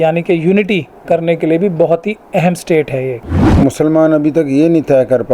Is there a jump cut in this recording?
yes; 1 cut; at 3.4 s

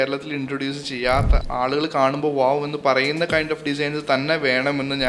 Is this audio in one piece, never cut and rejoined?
no; 1 cut; at 1.4 s

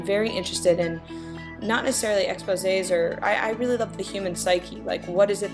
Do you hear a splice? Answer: no; 0 cuts

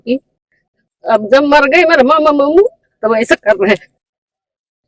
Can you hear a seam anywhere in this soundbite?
no; 0 cuts

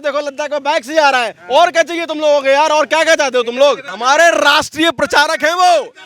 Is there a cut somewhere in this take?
yes; 1 cut; at 3.9 s

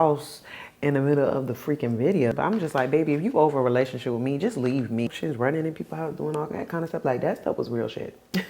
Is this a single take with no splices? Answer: no; 2 cuts; at 2.3 s, 5.1 s

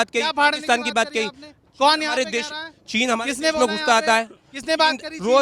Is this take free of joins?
yes; 0 cuts

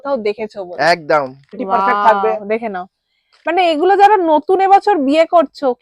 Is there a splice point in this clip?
yes; 1 cut; at 1.6 s

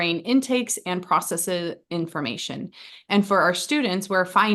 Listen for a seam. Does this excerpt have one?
no; 0 cuts

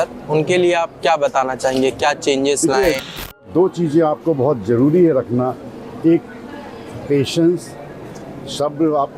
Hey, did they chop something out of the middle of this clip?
yes; 1 cut; at 3.0 s

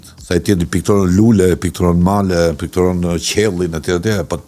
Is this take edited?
no; 0 cuts

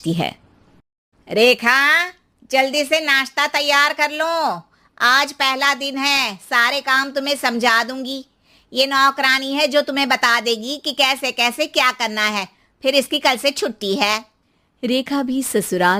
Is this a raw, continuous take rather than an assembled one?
yes; 0 cuts

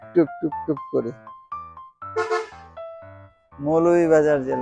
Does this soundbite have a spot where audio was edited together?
no; 0 cuts

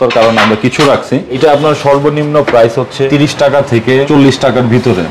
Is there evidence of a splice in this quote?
yes; 3 cuts; at 1.4 s, 3.1 s, 4.1 s

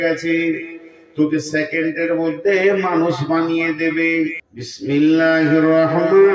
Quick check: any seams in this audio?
yes; 1 cut; at 4.5 s

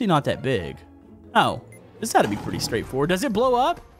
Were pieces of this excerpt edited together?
no; 0 cuts

